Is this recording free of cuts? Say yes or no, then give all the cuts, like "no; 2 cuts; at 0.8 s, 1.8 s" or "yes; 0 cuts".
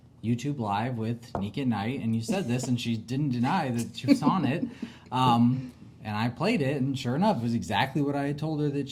yes; 0 cuts